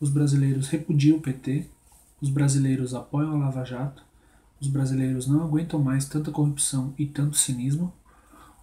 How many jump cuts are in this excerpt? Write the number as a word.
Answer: one